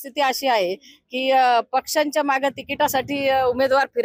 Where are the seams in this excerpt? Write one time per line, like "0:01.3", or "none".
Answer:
none

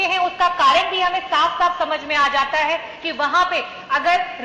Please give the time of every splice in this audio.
none

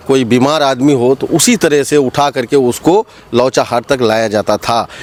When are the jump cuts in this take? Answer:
none

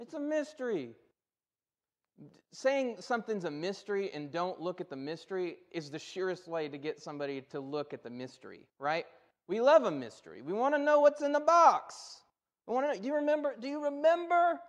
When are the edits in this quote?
none

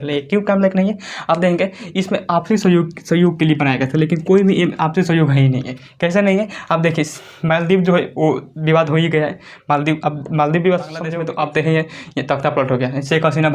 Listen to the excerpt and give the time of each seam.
0:11.1

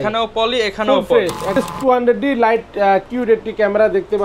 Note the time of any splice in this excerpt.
0:01.6

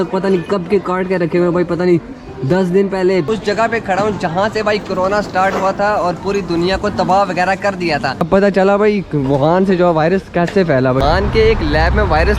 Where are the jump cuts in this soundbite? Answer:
0:03.3
0:08.3
0:11.0

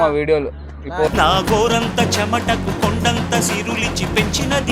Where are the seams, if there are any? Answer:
0:01.1

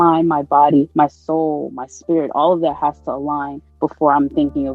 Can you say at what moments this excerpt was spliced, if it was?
0:00.9
0:03.6

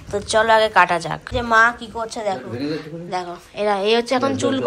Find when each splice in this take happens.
0:01.3

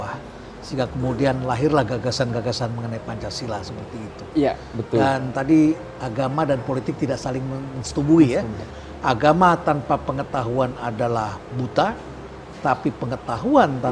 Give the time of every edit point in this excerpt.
0:08.6

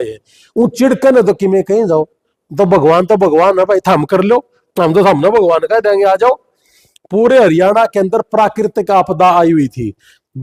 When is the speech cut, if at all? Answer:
none

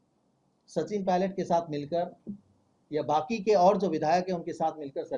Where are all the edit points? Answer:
none

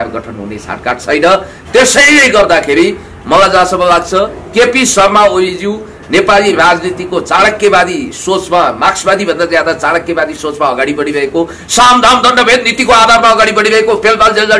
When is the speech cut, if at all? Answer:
none

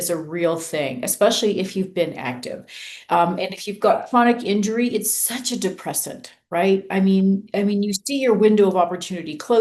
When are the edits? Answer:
none

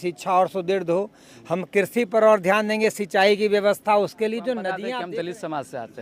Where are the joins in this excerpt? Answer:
0:04.9

